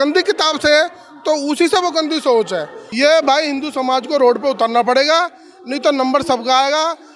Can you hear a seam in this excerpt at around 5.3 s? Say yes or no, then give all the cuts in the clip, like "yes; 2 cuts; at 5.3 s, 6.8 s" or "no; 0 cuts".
no; 1 cut; at 2.8 s